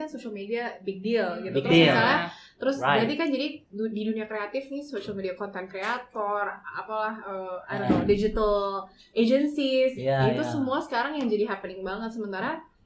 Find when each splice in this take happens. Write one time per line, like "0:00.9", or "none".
none

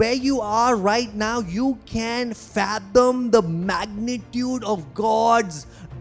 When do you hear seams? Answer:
none

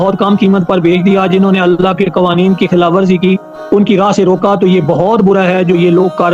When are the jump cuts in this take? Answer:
none

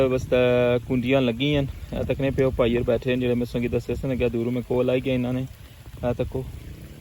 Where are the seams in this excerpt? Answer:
none

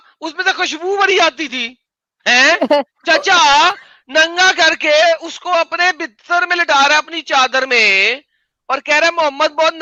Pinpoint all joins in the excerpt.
none

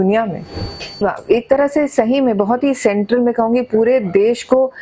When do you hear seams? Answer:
0:01.0

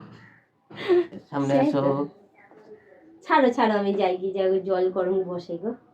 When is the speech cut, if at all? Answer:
0:01.2

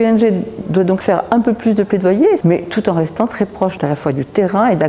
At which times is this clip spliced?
0:01.0
0:02.4
0:03.8

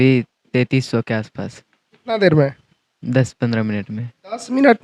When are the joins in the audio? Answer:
none

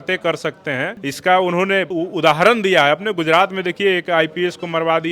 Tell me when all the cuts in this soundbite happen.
0:01.0
0:01.9

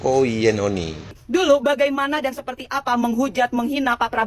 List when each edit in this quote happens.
0:01.2

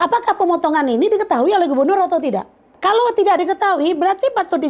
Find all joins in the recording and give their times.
0:02.7

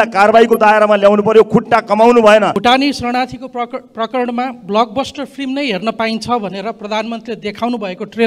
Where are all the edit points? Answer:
0:02.6

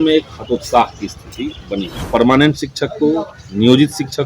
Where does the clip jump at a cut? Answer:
0:01.9

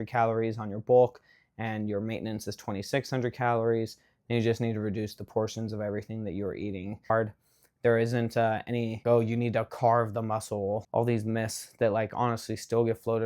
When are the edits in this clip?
0:07.1
0:09.0
0:10.8

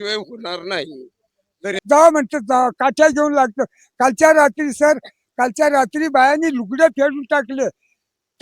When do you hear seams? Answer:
0:01.7

